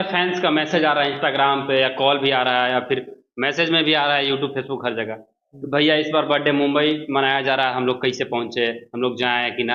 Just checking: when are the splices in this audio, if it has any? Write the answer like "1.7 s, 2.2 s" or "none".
none